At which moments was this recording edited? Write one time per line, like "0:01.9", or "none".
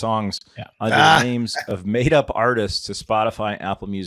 none